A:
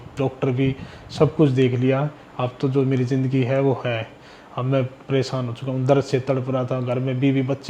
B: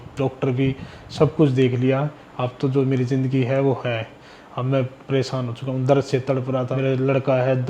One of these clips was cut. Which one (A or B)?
B